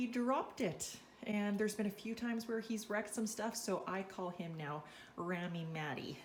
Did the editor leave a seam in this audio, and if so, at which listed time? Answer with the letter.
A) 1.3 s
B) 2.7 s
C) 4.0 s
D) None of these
D